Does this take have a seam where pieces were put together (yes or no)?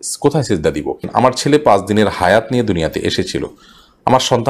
yes